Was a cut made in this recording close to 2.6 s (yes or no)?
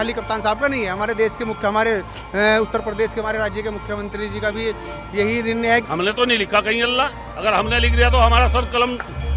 no